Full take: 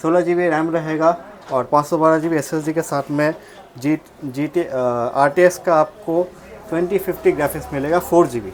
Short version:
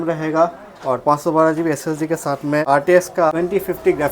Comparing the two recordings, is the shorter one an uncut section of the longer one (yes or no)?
no